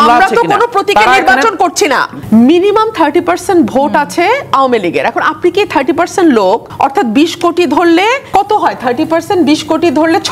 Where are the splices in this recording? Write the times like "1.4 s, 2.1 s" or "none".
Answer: 2.1 s, 6.7 s, 8.2 s